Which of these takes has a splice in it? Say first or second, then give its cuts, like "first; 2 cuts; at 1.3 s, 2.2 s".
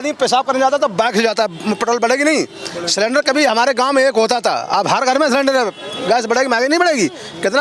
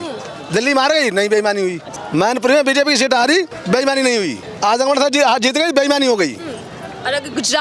second; 3 cuts; at 1.9 s, 3.5 s, 4.5 s